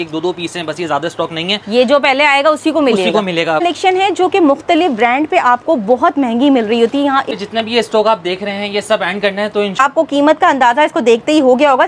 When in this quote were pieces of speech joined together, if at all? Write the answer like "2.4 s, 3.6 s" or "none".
3.6 s, 7.3 s, 9.8 s